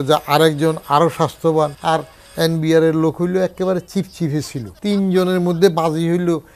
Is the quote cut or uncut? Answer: cut